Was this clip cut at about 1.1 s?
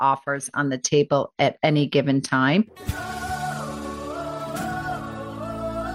no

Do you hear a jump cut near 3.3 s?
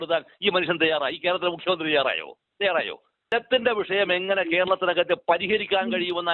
yes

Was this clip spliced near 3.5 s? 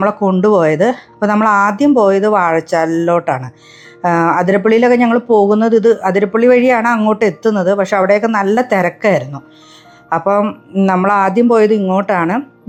no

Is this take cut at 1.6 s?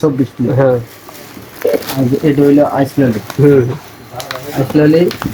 no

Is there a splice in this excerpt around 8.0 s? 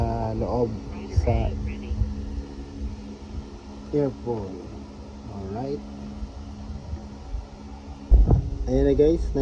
yes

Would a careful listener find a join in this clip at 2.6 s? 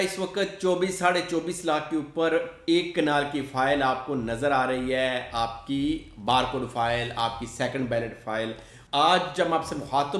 no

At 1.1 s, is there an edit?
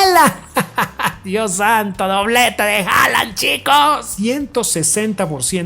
no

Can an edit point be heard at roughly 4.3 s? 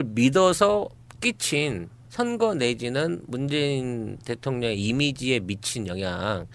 yes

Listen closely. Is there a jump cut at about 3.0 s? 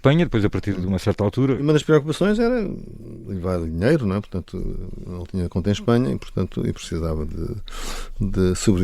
no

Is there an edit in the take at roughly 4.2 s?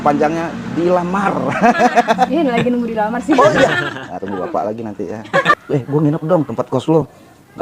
no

